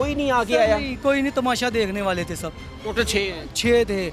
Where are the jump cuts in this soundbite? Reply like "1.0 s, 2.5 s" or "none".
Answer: 2.8 s